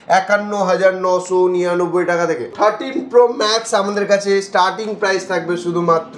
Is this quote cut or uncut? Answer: cut